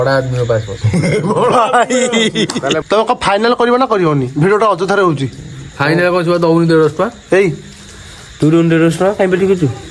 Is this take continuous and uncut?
no; 1 cut; at 2.8 s

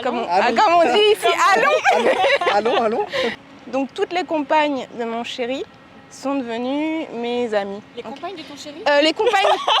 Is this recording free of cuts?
no; 1 cut; at 3.5 s

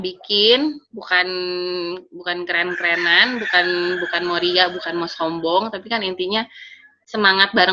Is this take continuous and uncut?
yes; 0 cuts

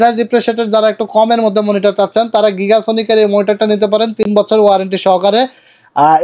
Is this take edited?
no; 0 cuts

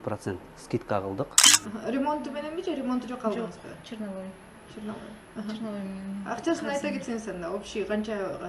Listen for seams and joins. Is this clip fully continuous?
no; 1 cut; at 1.5 s

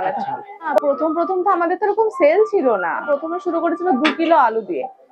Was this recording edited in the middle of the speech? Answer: yes; 2 cuts; at 0.8 s, 3.0 s

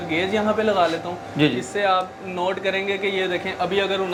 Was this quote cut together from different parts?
no; 0 cuts

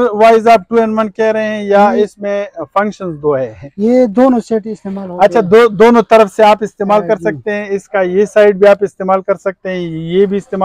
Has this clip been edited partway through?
no; 0 cuts

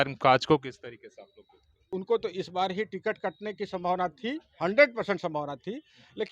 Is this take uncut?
no; 1 cut; at 1.8 s

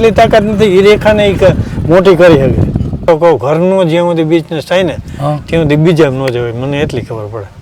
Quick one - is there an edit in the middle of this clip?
yes; 1 cut; at 3.0 s

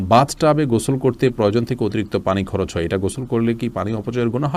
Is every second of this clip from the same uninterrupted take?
yes; 0 cuts

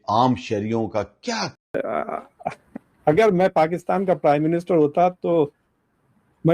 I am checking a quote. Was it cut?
yes; 1 cut; at 1.6 s

